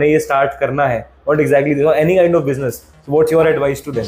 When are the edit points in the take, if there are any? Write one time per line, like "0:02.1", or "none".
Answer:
none